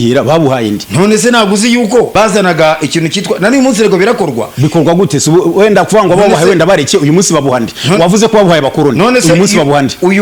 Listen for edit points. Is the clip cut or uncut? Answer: cut